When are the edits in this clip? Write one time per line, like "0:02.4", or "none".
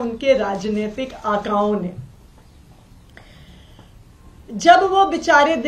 none